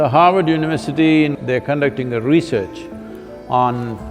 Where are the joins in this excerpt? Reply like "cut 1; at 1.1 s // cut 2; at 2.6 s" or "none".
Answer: cut 1; at 1.4 s

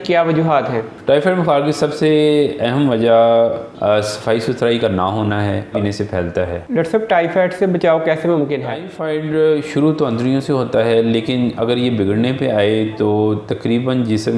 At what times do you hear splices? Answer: cut 1; at 5.8 s // cut 2; at 8.9 s

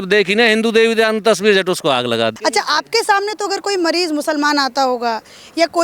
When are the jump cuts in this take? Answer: cut 1; at 2.4 s

